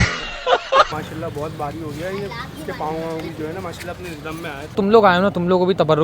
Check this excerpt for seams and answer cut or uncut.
cut